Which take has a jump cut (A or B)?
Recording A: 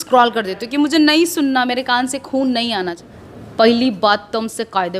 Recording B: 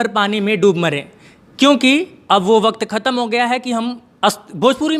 A